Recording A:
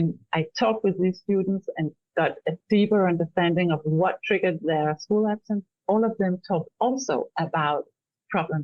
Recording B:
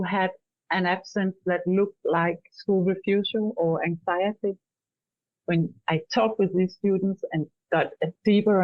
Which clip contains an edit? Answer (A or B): A